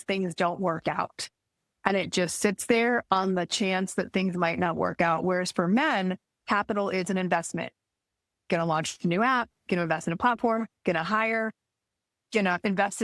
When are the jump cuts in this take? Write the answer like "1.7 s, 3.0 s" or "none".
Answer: none